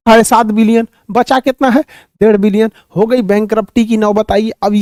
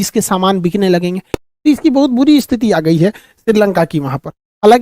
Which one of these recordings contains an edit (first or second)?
second